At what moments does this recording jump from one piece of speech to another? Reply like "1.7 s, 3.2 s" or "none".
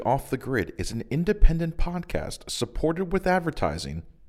none